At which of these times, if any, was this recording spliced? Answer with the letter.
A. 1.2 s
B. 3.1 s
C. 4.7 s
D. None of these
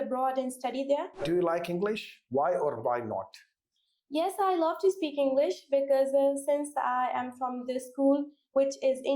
A